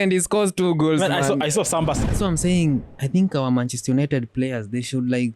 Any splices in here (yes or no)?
yes